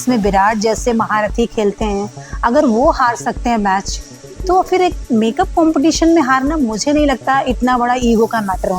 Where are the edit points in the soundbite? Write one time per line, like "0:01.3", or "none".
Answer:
none